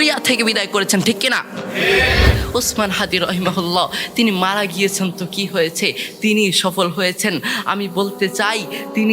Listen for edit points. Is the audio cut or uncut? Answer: cut